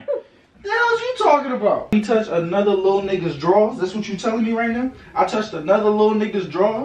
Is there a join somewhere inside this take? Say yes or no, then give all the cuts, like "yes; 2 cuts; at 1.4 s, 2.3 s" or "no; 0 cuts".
yes; 1 cut; at 1.9 s